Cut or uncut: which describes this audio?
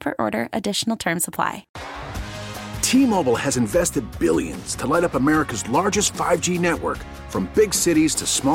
cut